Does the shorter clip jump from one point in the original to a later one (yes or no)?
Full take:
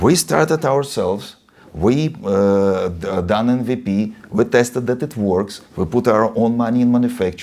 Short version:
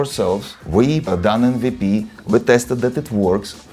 yes